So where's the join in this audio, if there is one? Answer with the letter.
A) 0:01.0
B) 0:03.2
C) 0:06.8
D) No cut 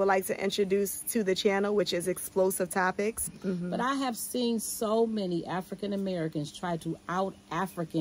B